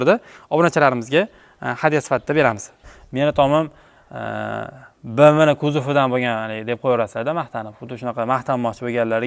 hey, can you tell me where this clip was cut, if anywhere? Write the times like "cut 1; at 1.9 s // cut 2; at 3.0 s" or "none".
cut 1; at 2.9 s